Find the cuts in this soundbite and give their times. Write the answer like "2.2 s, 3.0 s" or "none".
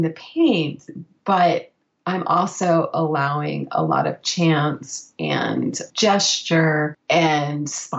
7.0 s